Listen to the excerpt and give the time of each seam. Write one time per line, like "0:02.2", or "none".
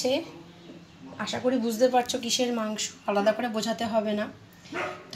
none